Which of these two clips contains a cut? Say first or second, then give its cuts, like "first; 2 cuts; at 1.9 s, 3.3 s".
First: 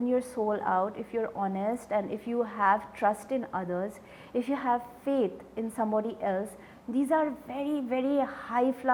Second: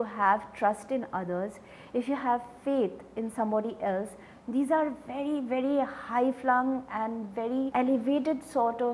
second; 1 cut; at 7.7 s